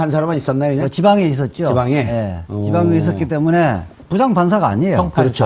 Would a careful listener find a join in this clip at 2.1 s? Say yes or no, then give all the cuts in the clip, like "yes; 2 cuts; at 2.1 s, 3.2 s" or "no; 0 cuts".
yes; 1 cut; at 2.1 s